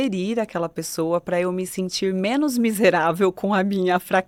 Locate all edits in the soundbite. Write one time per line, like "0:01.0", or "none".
none